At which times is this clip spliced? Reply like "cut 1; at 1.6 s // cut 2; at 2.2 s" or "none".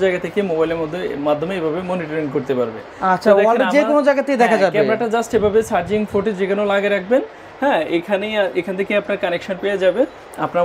none